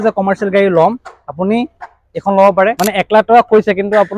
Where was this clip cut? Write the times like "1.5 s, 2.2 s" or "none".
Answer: 2.8 s